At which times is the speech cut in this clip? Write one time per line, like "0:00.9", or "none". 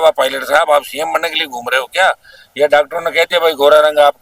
none